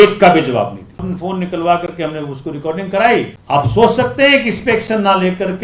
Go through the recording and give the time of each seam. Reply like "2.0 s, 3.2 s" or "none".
1.0 s, 3.4 s